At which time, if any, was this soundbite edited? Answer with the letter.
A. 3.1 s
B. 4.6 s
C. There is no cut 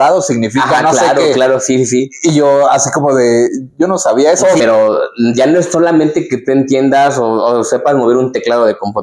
B